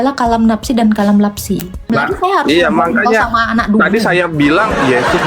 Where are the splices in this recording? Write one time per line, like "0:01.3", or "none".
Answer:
0:01.9